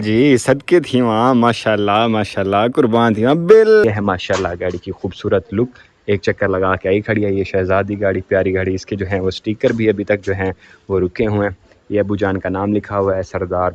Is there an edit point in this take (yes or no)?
yes